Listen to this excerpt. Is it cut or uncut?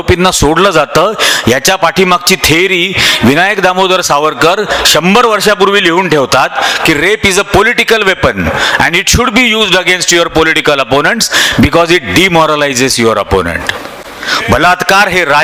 uncut